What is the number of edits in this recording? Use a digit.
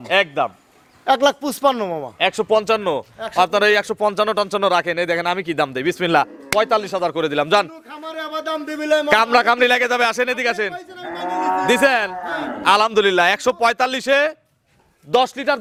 0